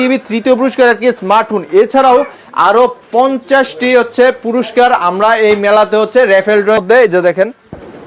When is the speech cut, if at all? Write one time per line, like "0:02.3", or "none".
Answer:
0:06.8